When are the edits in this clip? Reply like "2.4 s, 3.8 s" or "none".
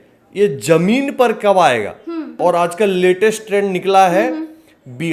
2.2 s